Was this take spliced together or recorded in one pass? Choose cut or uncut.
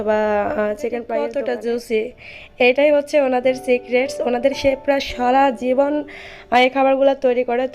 cut